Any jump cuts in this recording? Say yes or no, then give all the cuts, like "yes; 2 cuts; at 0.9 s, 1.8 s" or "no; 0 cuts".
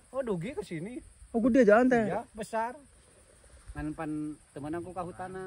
no; 0 cuts